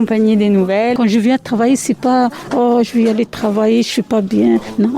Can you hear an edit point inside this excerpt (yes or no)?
yes